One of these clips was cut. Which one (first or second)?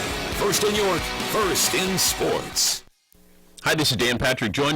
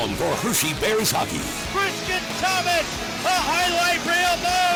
first